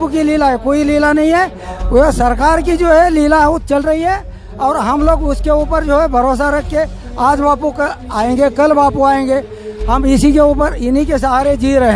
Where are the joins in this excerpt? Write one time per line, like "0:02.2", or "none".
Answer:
none